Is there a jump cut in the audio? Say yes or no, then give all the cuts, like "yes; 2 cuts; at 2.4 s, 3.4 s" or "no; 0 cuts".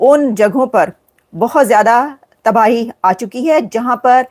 no; 0 cuts